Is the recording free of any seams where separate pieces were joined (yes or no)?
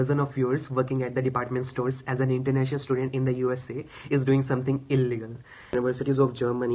no